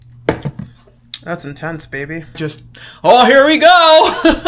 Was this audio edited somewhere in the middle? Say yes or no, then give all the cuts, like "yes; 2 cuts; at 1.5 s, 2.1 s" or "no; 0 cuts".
yes; 1 cut; at 2.4 s